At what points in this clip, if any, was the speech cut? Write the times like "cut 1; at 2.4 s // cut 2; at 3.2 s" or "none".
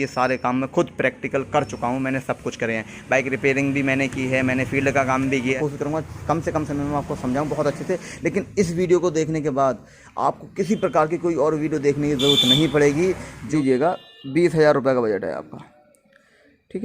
cut 1; at 5.4 s // cut 2; at 13.5 s